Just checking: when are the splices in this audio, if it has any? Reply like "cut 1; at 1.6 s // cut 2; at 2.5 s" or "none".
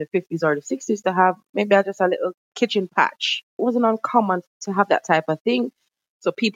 cut 1; at 2.5 s // cut 2; at 3.6 s // cut 3; at 4.5 s // cut 4; at 5.7 s